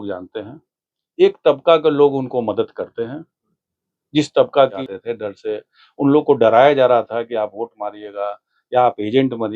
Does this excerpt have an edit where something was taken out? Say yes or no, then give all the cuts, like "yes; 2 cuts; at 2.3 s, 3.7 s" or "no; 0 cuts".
yes; 1 cut; at 4.9 s